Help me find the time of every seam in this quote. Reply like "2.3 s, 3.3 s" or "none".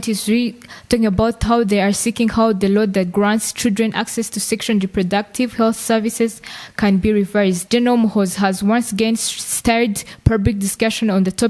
7.6 s